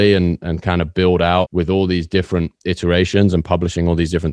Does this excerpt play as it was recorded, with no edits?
no; 1 cut; at 1.5 s

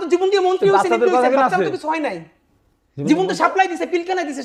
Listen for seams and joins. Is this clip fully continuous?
yes; 0 cuts

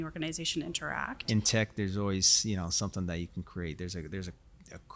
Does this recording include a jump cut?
yes; 1 cut; at 1.3 s

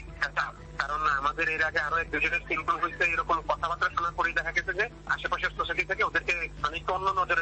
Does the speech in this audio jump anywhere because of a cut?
no; 0 cuts

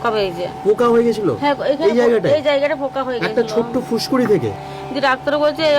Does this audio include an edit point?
yes; 1 cut; at 4.6 s

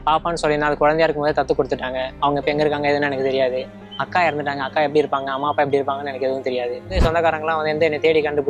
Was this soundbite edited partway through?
yes; 1 cut; at 6.9 s

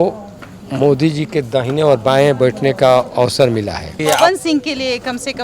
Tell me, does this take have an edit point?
yes; 1 cut; at 4.0 s

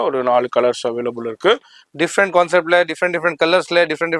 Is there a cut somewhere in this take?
yes; 1 cut; at 1.8 s

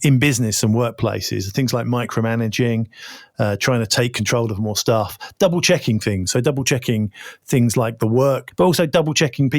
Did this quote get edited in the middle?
yes; 1 cut; at 8.5 s

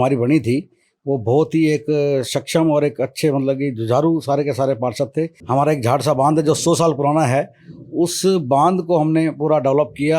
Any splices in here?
yes; 1 cut; at 5.4 s

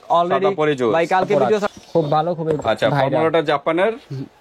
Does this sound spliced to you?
yes; 1 cut; at 1.7 s

